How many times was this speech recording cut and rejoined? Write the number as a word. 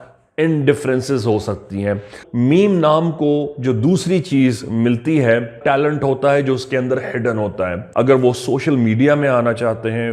three